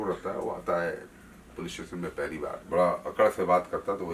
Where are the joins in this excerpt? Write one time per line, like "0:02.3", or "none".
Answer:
0:02.6